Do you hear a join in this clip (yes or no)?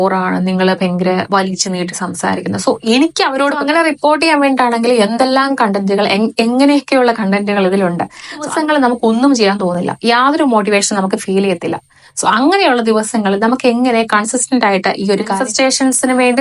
yes